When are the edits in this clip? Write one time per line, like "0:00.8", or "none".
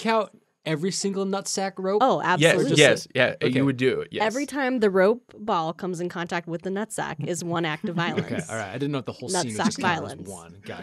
none